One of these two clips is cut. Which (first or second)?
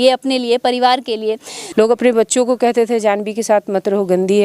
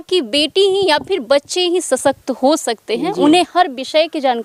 first